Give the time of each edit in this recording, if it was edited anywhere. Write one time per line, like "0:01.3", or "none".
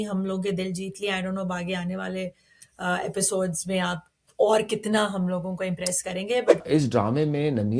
0:06.6